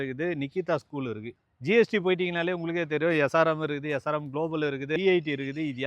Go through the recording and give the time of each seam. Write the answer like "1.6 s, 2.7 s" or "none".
1.4 s, 5.0 s